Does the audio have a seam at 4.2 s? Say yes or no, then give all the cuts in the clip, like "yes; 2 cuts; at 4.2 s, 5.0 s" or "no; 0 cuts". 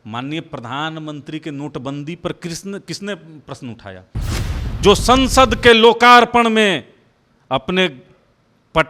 yes; 1 cut; at 4.2 s